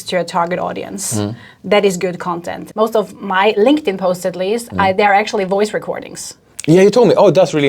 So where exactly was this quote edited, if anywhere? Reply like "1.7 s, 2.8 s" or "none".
2.6 s